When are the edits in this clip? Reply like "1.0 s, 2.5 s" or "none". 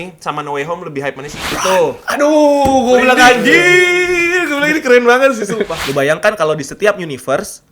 1.4 s, 5.8 s